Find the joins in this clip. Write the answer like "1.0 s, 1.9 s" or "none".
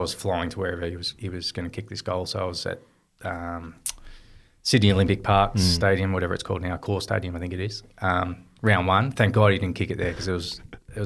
none